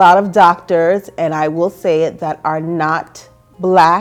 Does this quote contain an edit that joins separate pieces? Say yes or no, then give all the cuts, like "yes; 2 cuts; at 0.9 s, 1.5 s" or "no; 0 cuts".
no; 0 cuts